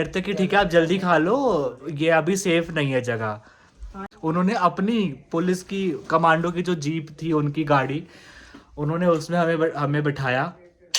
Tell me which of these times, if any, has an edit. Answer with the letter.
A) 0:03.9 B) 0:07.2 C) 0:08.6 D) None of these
A